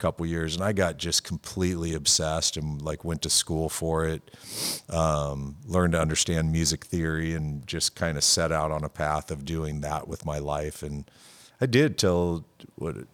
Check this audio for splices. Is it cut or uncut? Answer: uncut